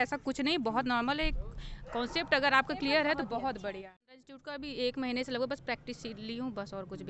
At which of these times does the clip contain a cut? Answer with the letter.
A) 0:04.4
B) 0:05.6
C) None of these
A